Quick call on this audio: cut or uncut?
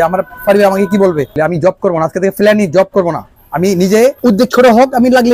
cut